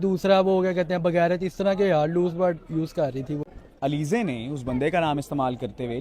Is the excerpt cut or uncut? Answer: cut